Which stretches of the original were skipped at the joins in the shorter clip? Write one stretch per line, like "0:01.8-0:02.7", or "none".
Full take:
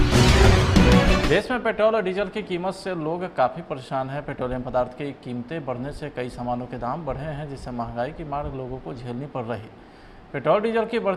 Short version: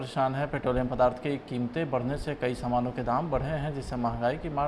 none